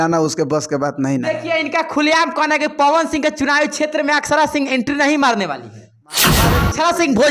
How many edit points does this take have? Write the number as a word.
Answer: one